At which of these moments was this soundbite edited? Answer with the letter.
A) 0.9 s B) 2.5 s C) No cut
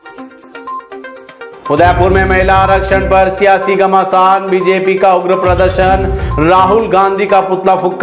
A